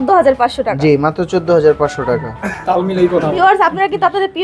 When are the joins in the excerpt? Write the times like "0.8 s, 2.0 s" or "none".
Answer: 3.4 s